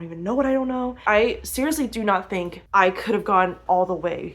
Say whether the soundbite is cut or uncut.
cut